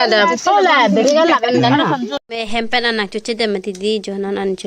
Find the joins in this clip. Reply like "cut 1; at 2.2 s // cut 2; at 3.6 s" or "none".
cut 1; at 2.2 s